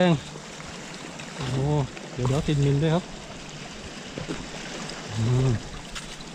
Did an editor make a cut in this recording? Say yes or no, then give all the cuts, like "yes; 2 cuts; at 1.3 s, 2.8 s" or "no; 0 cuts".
no; 0 cuts